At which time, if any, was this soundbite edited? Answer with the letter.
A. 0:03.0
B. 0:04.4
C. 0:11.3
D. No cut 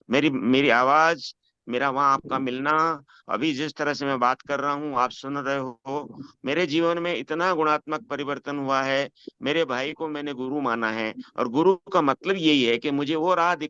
D